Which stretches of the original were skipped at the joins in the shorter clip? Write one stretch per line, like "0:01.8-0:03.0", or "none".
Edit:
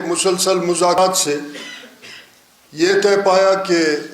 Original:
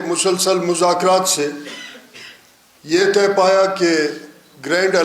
0:01.0-0:01.1

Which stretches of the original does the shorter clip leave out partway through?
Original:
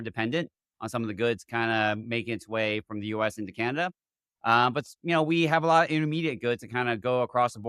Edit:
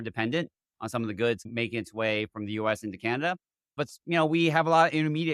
0:01.5-0:02.0
0:04.3-0:04.7

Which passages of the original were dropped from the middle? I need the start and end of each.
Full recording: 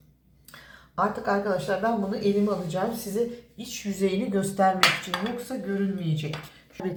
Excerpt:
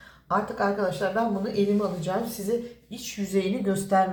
none

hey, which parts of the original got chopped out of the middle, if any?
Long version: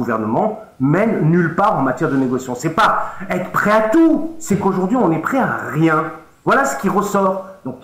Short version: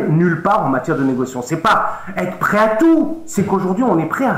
none

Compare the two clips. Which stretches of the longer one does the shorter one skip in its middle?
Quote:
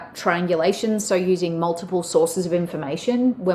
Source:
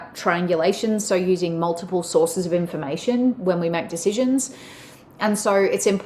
none

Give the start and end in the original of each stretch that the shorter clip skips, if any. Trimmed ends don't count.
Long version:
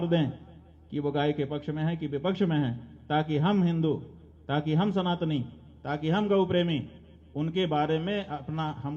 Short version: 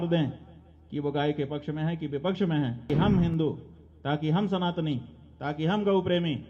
0:02.8-0:03.3

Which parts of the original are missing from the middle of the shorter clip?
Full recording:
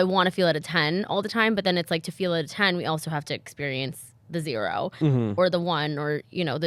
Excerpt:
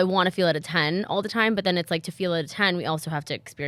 none

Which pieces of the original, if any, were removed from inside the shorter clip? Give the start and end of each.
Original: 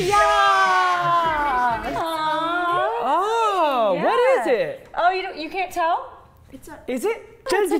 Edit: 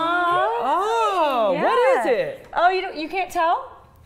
none

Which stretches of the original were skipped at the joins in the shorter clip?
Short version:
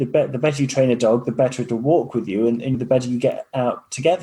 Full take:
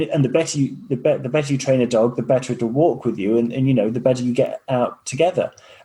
0:03.7-0:03.9

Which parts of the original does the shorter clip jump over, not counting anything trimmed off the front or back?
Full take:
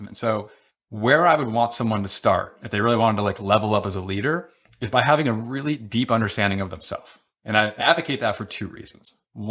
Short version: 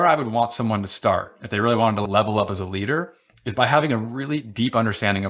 0:03.3-0:03.4

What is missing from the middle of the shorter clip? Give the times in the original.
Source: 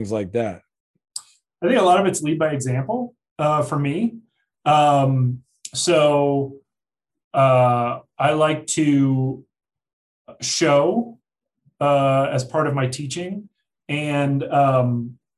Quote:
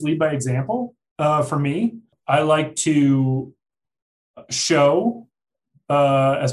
0:04.3-0:08.0

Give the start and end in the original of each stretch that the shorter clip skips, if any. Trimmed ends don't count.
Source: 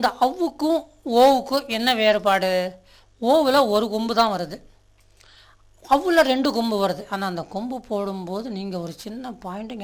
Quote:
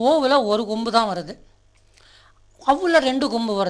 none

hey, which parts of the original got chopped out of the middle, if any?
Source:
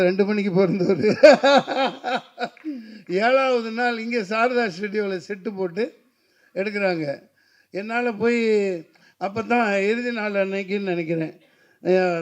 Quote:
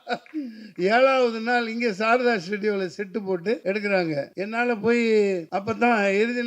0:05.9-0:06.5
0:07.2-0:07.7
0:08.9-0:09.2

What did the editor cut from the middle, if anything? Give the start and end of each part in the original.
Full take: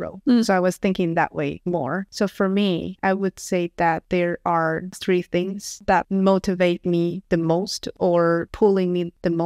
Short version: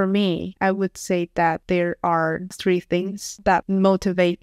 none

